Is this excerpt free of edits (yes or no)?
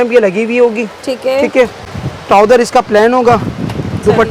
yes